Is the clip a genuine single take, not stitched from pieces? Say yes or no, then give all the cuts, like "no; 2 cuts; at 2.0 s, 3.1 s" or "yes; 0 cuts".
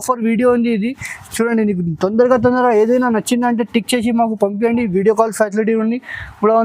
yes; 0 cuts